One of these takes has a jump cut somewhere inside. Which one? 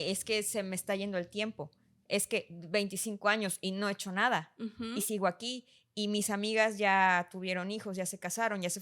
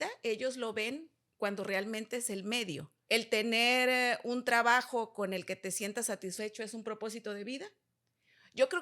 second; 1 cut; at 2.9 s

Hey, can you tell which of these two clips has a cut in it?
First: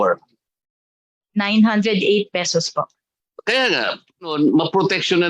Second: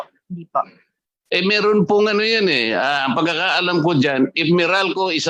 first; 1 cut; at 4.3 s

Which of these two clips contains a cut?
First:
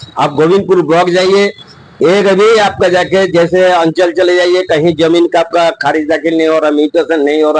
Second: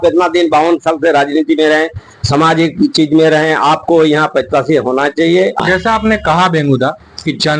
second; 1 cut; at 5.6 s

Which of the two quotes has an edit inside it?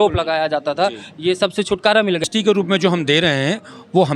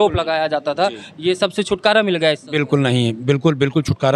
first; 1 cut; at 2.2 s

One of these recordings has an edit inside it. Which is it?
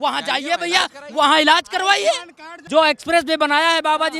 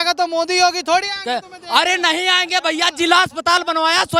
first; 1 cut; at 2.5 s

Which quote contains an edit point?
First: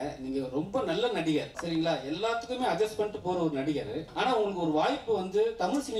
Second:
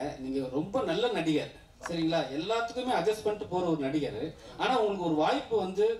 first; 2 cuts; at 1.6 s, 4.0 s

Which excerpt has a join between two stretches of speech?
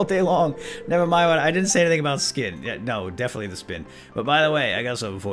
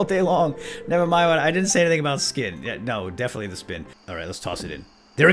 second; 1 cut; at 4.0 s

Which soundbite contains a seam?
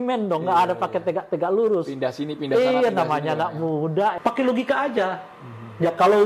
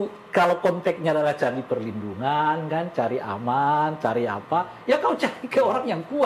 first; 1 cut; at 4.2 s

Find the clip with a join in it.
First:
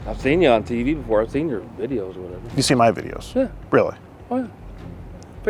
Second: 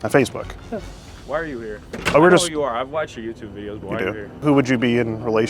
second; 2 cuts; at 1.2 s, 4.4 s

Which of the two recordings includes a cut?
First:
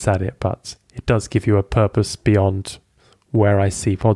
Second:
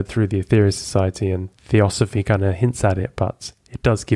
second; 1 cut; at 1.5 s

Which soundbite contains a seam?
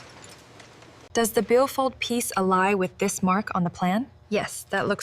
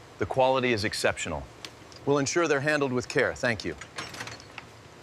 first; 1 cut; at 0.9 s

